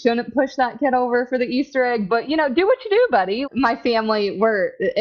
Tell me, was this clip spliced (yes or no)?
yes